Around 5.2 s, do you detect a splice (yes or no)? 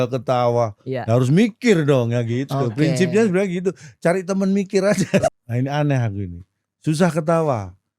yes